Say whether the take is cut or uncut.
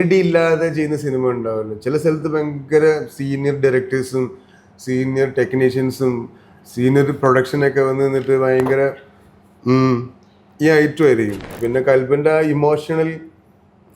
cut